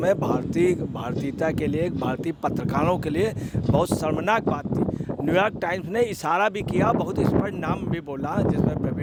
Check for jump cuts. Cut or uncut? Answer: uncut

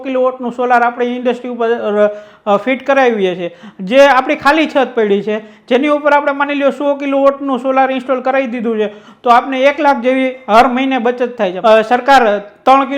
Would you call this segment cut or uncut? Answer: cut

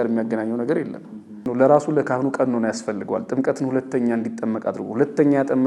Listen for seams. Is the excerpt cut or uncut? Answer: cut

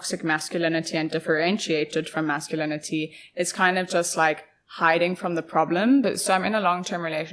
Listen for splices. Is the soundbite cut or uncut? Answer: cut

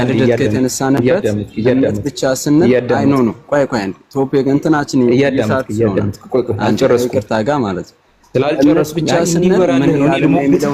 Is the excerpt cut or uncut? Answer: uncut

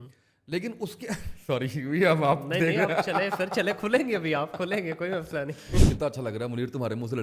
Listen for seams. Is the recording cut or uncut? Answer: cut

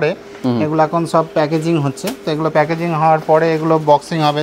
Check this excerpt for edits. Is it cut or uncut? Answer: uncut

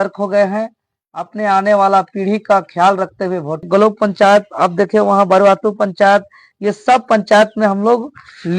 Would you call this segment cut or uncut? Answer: cut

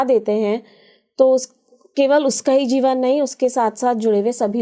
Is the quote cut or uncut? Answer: uncut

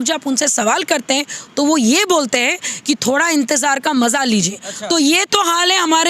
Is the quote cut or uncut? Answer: uncut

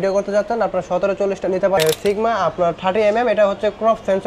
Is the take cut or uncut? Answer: cut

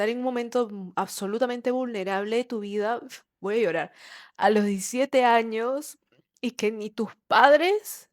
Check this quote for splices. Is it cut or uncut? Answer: uncut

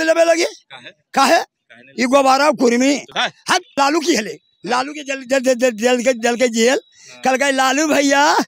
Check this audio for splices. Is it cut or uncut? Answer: cut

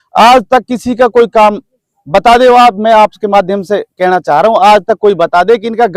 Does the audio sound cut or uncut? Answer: uncut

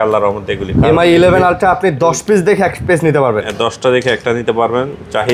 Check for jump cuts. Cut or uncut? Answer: uncut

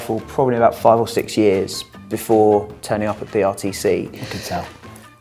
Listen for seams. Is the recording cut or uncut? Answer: uncut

